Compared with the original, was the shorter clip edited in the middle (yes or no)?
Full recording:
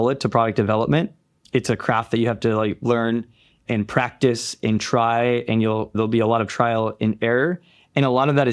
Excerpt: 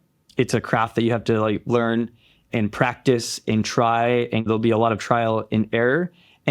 yes